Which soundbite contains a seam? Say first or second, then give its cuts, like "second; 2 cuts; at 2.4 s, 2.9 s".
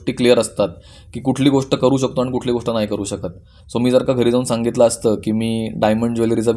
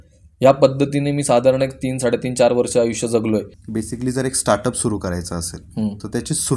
second; 1 cut; at 3.6 s